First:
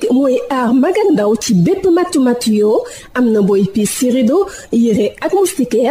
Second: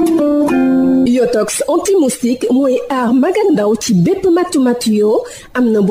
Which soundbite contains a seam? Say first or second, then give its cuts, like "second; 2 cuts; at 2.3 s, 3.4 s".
second; 1 cut; at 1.0 s